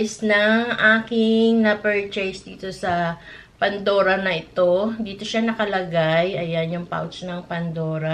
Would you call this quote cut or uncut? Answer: uncut